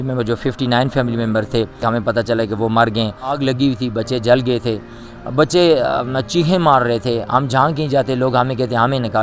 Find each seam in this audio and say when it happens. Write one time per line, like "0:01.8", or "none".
0:01.8
0:03.4